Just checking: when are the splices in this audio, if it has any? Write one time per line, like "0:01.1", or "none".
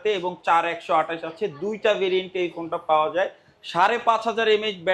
none